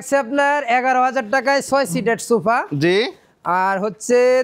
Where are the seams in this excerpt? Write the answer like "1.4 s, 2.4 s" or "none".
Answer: none